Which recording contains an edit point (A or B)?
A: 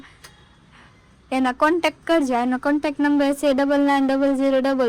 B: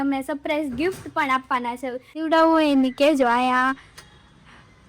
B